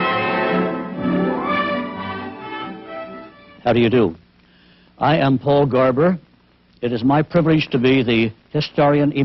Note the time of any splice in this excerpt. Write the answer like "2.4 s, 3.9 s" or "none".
none

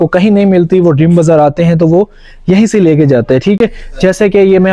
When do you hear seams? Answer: none

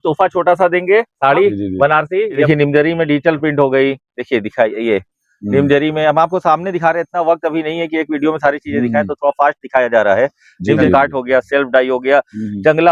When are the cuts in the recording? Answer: 2.4 s, 10.8 s

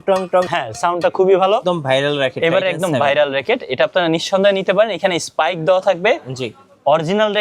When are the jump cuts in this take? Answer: 1.6 s

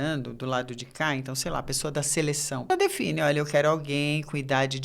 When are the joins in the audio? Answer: 2.7 s

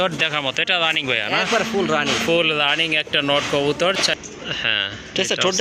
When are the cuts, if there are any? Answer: 4.2 s

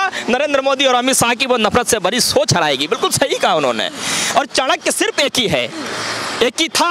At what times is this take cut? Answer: none

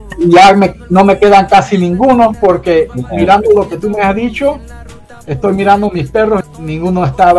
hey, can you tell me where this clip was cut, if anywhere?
6.4 s

